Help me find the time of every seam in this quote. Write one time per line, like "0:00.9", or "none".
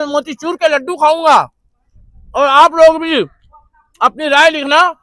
none

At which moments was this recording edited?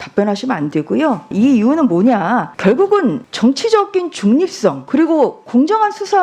0:01.3
0:02.5
0:03.3
0:04.8

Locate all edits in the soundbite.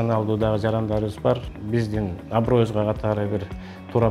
0:01.5

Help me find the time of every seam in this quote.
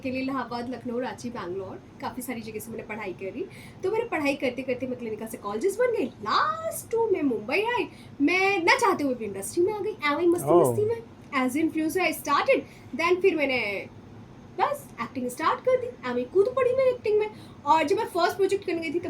none

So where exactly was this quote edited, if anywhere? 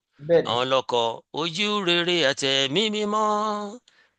none

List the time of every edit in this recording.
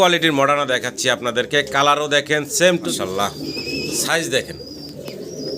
0:02.9

